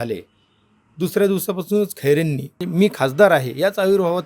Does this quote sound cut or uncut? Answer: cut